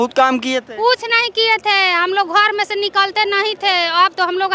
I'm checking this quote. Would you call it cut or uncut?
uncut